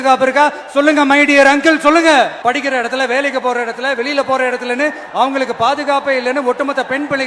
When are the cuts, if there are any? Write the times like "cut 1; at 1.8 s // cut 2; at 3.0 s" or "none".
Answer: cut 1; at 2.3 s